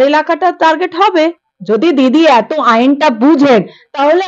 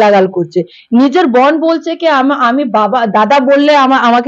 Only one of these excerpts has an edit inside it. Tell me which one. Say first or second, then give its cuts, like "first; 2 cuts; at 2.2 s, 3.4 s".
first; 1 cut; at 1.5 s